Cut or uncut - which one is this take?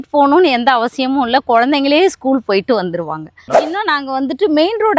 cut